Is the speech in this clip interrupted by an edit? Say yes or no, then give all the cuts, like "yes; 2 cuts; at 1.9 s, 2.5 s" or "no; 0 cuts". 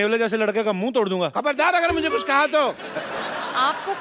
no; 0 cuts